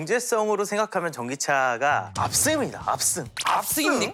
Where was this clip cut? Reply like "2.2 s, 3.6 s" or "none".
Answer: none